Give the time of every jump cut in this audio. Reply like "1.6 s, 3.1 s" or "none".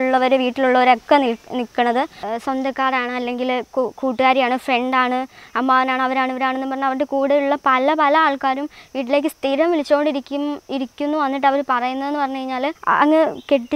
2.2 s, 12.8 s